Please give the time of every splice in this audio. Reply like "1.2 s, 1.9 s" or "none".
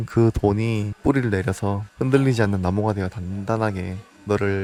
none